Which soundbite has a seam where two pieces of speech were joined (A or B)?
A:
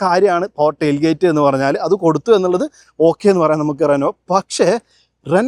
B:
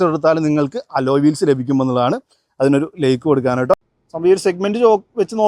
B